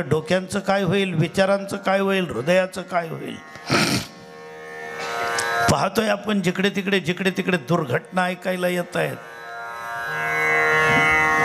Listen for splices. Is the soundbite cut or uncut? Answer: uncut